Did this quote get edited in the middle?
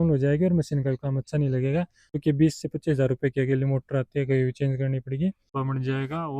yes; 2 cuts; at 2.2 s, 5.5 s

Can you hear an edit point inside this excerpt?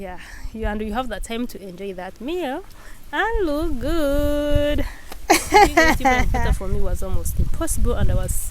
yes; 1 cut; at 6.3 s

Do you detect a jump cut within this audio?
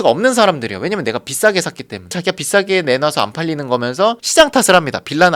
no; 0 cuts

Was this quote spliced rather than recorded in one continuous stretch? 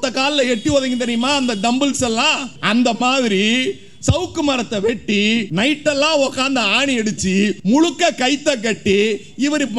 yes; 3 cuts; at 2.5 s, 5.5 s, 7.6 s

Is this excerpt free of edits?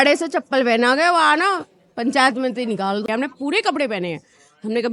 no; 1 cut; at 3.0 s

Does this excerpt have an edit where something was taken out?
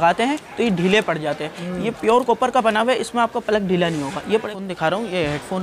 yes; 1 cut; at 4.5 s

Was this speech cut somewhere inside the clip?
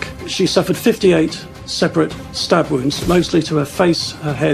no; 0 cuts

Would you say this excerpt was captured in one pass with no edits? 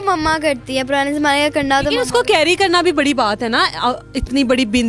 yes; 0 cuts

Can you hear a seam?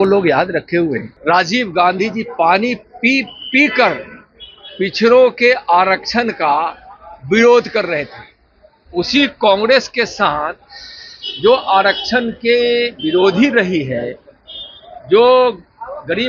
yes; 1 cut; at 1.1 s

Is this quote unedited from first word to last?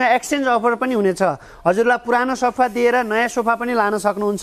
yes; 0 cuts

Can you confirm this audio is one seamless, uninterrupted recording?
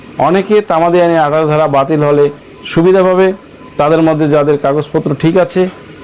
yes; 0 cuts

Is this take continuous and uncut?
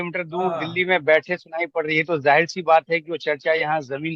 yes; 0 cuts

